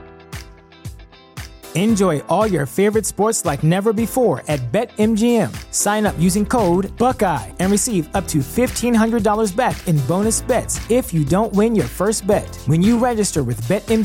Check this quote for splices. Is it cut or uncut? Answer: uncut